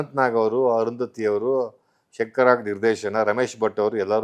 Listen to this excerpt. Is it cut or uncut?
uncut